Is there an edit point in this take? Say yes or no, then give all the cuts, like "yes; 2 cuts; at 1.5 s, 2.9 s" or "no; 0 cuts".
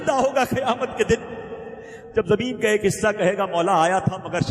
no; 0 cuts